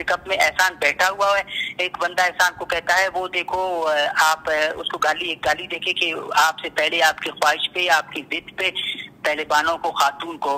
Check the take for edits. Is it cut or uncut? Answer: uncut